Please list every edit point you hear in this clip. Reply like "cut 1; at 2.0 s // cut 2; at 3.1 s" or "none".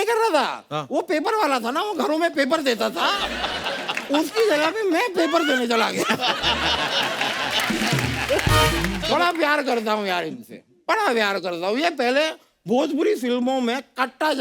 cut 1; at 9.0 s